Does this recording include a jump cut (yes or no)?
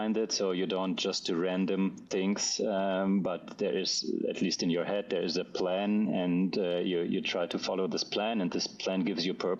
no